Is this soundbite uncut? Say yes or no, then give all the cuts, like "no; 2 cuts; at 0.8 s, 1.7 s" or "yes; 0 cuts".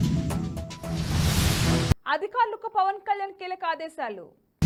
yes; 0 cuts